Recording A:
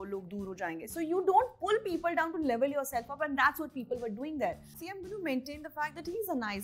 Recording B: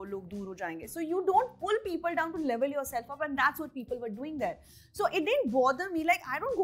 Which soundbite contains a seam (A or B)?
A